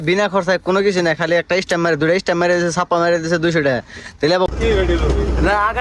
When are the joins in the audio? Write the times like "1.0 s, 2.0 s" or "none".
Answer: 4.5 s